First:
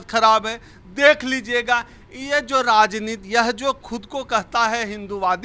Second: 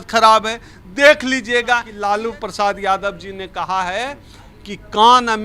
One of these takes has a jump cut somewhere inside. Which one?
second; 1 cut; at 1.9 s

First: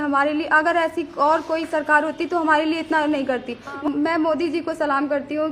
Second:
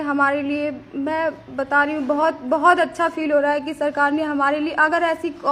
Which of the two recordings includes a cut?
first; 1 cut; at 3.8 s

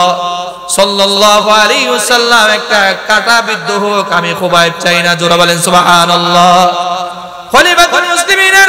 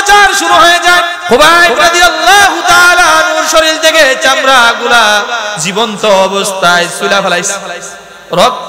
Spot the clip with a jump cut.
second; 1 cut; at 1.2 s

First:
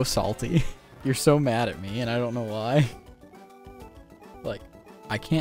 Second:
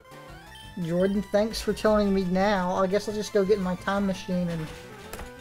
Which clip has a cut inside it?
first; 2 cuts; at 0.9 s, 4.3 s

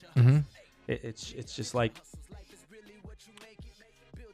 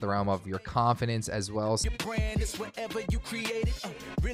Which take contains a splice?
second; 1 cut; at 1.8 s

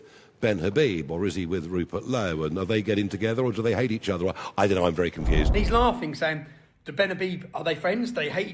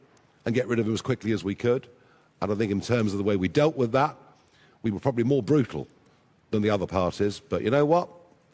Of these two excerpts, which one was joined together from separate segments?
first; 1 cut; at 5.5 s

